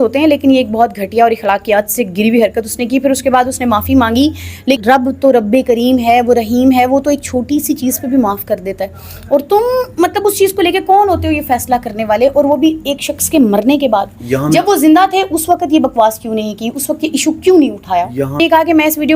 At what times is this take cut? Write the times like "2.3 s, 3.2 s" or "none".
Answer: 4.8 s, 18.4 s